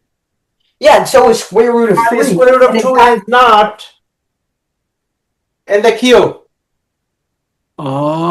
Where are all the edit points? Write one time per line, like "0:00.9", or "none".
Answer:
none

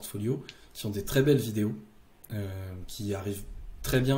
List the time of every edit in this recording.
none

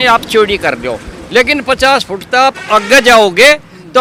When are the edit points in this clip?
none

